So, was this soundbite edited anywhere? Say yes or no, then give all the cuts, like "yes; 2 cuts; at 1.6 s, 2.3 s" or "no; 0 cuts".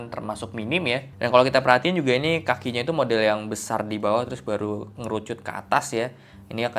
yes; 1 cut; at 1.1 s